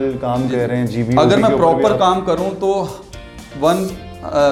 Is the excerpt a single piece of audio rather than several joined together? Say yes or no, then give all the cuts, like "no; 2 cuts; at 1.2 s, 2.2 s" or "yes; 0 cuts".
yes; 0 cuts